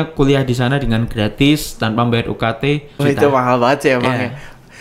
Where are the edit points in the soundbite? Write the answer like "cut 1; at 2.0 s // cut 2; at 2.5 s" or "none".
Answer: cut 1; at 3.0 s